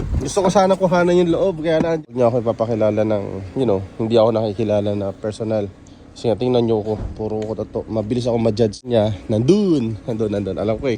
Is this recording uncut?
no; 2 cuts; at 2.1 s, 8.9 s

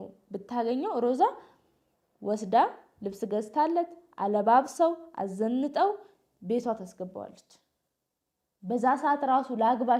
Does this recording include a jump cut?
no; 0 cuts

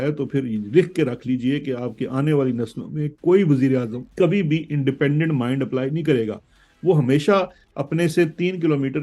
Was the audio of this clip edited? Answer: yes; 1 cut; at 4.0 s

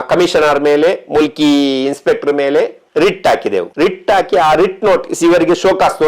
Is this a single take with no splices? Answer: no; 1 cut; at 3.7 s

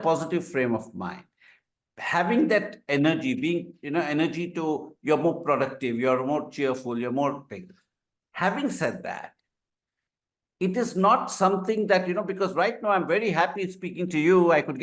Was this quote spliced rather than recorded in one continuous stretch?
no; 0 cuts

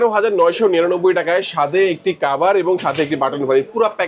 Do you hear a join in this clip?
no; 0 cuts

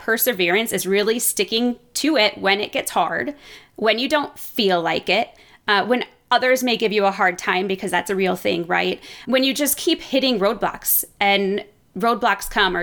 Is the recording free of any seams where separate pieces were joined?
yes; 0 cuts

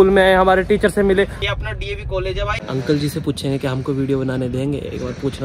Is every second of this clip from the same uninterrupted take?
no; 2 cuts; at 1.4 s, 2.6 s

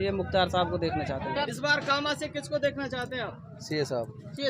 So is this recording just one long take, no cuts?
no; 1 cut; at 1.5 s

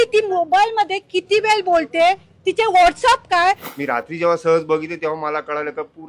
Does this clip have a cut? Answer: yes; 1 cut; at 3.7 s

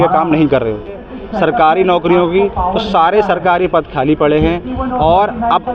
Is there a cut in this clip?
yes; 1 cut; at 1.2 s

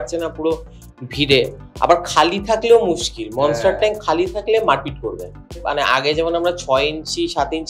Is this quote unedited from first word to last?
no; 1 cut; at 5.6 s

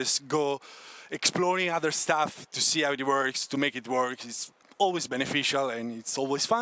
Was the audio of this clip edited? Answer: no; 0 cuts

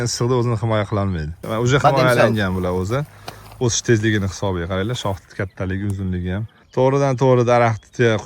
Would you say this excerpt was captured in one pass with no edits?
no; 2 cuts; at 1.4 s, 6.7 s

